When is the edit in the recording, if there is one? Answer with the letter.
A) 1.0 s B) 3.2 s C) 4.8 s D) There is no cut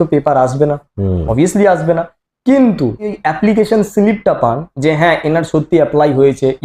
B